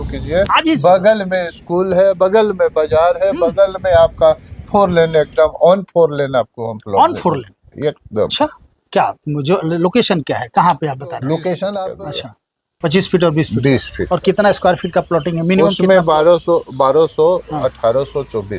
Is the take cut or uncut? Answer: cut